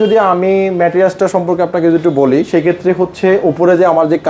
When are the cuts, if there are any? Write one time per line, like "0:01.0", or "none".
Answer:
none